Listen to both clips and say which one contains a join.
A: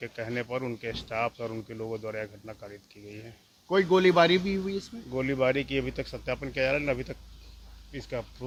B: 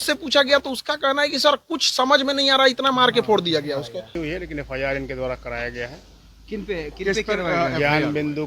B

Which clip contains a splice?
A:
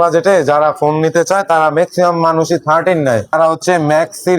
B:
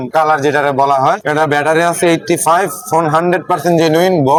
A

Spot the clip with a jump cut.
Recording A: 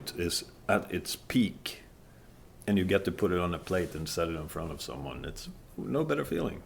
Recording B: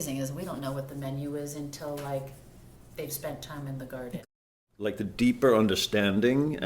B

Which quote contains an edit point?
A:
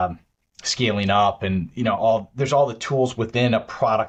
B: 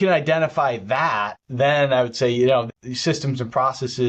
B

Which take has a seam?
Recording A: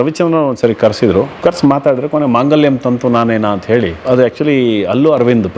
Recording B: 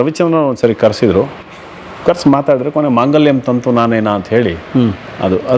A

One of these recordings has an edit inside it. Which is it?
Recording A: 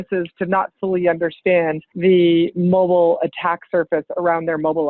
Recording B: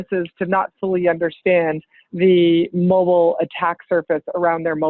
A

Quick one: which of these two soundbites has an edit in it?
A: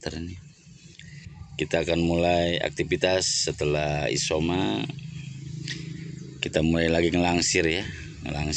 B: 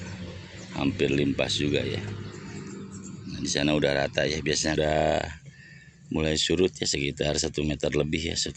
B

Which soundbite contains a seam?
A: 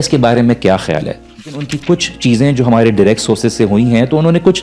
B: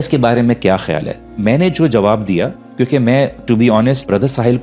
A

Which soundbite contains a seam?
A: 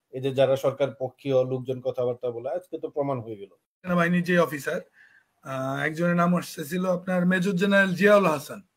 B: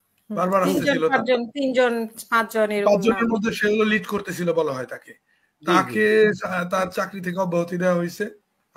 A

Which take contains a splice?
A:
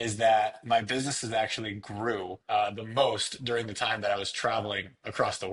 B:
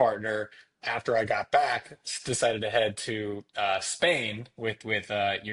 A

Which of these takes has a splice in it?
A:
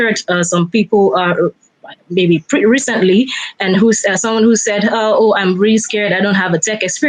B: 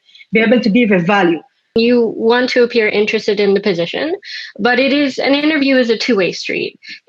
B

